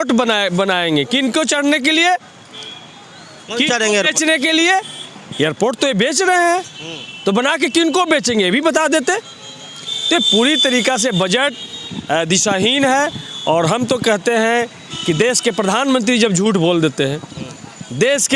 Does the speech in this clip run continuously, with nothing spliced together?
yes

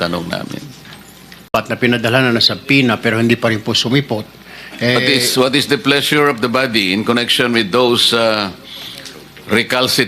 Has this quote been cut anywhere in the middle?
yes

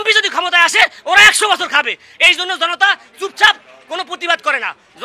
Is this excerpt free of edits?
yes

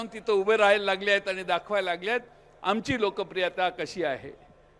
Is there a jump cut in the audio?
no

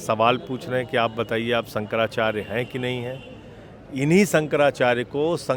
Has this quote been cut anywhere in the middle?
no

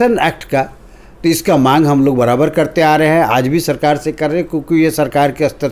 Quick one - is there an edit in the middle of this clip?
no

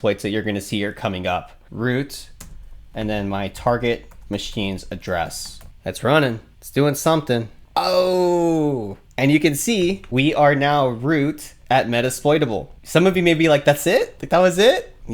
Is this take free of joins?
no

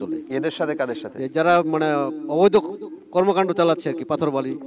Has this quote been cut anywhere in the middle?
no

